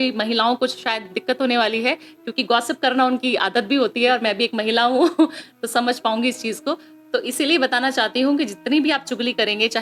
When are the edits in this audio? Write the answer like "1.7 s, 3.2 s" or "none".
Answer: none